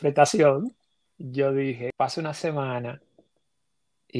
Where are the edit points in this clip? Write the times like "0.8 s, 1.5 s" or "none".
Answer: 1.9 s